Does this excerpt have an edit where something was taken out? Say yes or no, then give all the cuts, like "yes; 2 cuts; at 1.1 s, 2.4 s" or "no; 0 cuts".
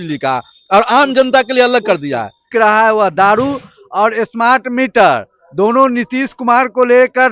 yes; 1 cut; at 2.4 s